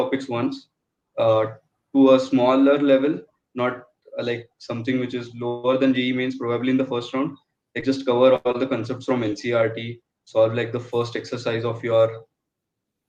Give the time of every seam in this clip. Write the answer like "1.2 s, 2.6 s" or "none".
none

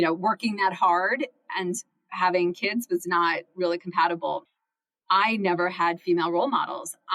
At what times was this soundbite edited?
4.5 s

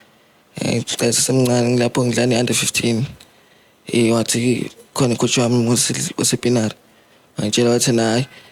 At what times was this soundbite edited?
none

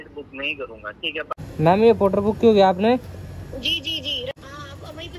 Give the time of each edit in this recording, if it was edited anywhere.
1.4 s, 4.3 s

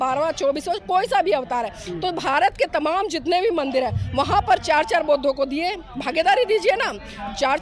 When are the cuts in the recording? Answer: none

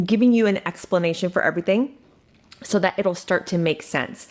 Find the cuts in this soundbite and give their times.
none

